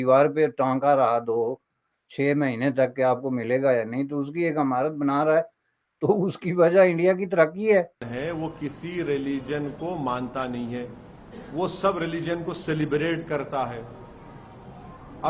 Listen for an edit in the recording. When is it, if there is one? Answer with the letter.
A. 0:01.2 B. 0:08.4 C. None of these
B